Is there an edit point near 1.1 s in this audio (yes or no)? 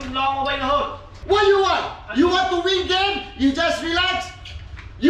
yes